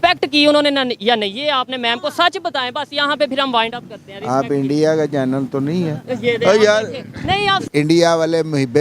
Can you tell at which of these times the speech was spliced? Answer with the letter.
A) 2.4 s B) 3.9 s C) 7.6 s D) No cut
C